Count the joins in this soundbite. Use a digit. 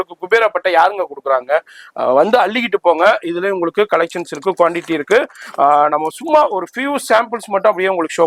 0